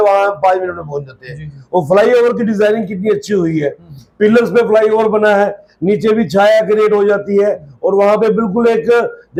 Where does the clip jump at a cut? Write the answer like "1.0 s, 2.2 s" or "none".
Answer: none